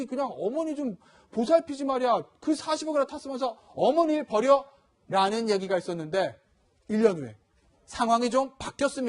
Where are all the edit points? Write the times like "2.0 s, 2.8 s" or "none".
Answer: 4.6 s